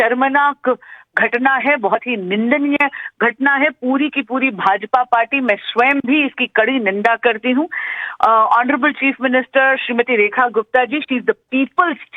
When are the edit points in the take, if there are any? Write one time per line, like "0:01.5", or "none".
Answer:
none